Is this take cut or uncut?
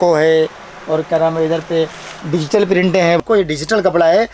cut